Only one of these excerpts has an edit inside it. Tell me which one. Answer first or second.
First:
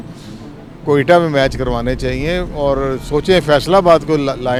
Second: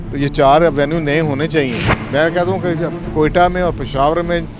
second